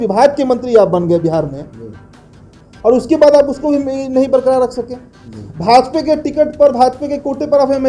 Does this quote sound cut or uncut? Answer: uncut